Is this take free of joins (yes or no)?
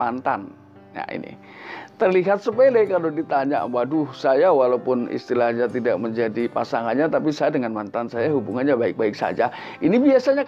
yes